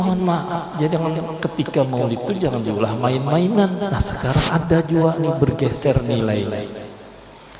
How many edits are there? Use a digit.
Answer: 1